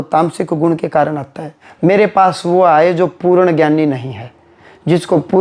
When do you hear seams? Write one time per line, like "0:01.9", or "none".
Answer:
0:01.6